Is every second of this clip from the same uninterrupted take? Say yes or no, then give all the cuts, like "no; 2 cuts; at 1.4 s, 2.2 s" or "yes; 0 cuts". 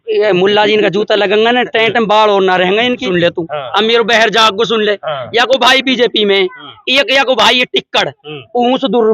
no; 1 cut; at 3.0 s